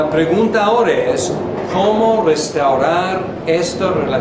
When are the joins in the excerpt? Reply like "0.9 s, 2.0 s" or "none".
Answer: 2.4 s